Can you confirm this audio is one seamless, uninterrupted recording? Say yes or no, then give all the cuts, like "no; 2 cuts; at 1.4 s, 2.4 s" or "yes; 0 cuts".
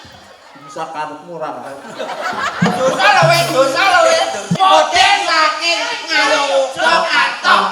no; 1 cut; at 4.5 s